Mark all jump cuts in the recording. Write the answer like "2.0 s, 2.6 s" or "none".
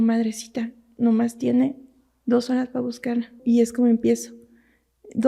3.4 s